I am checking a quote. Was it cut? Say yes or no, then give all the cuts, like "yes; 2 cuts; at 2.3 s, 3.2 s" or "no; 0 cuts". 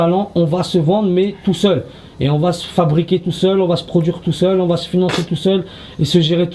no; 0 cuts